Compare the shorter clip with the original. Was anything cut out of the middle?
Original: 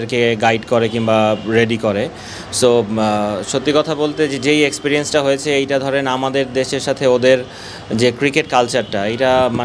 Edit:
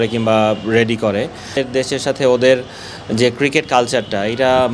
yes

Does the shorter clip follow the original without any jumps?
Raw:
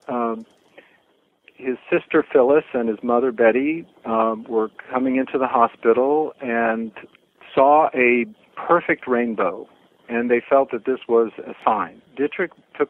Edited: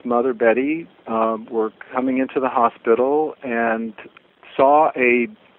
yes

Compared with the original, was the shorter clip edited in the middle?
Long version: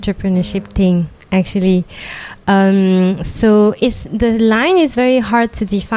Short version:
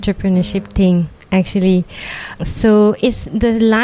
yes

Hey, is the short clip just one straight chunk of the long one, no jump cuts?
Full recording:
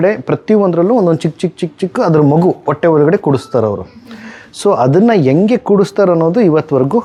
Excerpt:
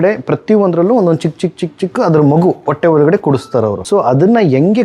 no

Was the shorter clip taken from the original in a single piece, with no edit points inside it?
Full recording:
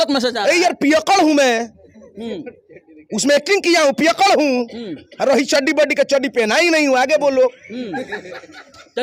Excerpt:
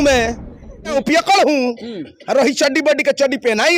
no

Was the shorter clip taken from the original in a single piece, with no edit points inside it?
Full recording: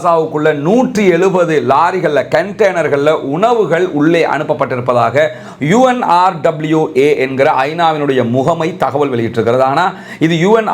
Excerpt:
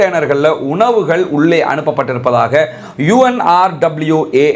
yes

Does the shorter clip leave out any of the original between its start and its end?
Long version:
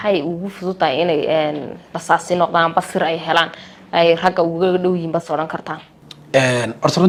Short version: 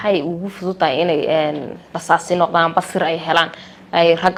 no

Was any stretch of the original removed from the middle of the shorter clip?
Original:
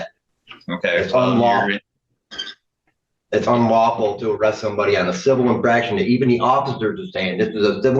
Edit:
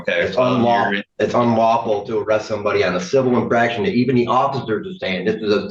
yes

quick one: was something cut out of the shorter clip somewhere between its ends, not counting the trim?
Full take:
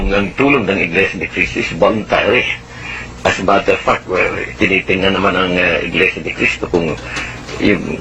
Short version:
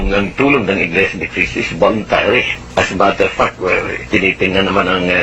yes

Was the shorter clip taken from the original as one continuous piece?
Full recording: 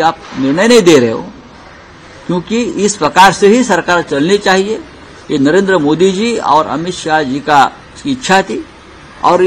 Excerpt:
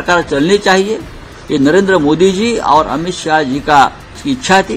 yes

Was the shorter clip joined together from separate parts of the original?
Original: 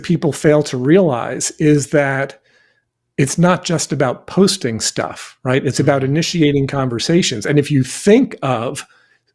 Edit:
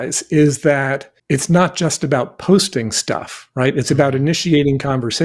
yes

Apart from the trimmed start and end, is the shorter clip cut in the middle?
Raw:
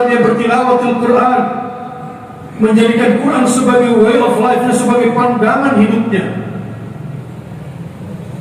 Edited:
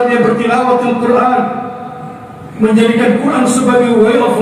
no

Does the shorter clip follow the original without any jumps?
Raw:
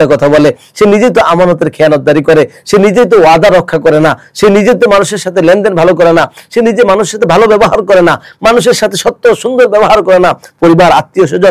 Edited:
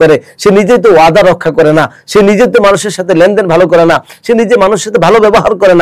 yes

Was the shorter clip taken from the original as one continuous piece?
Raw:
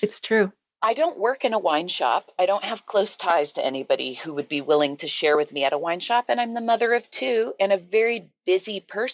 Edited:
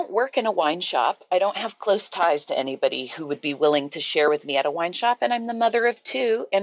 yes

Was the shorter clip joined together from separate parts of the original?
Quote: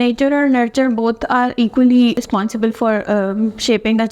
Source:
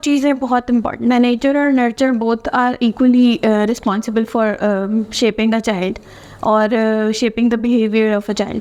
yes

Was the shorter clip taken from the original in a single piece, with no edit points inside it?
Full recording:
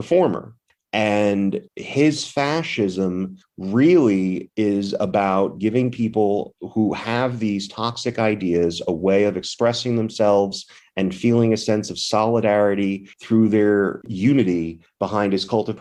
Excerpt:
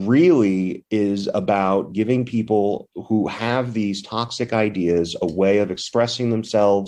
yes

